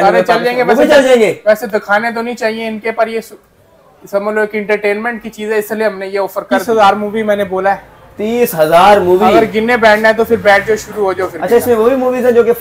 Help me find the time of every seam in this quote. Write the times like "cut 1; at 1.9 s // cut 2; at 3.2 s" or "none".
cut 1; at 6.6 s